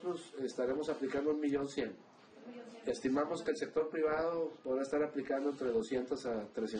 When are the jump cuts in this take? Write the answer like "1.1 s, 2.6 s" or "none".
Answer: none